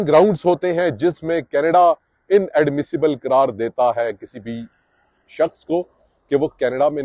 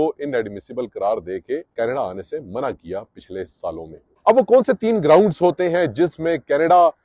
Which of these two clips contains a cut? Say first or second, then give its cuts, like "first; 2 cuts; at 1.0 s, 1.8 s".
second; 2 cuts; at 1.7 s, 4.0 s